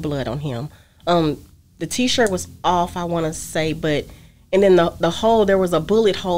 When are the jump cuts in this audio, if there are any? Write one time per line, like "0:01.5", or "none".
none